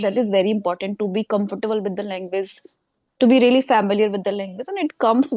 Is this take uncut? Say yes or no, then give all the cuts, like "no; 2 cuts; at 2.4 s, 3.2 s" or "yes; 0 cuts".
yes; 0 cuts